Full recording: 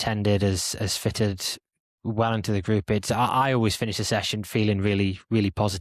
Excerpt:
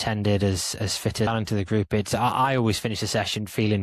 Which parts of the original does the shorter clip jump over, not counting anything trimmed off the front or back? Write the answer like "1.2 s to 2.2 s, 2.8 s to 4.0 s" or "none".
1.3 s to 2.2 s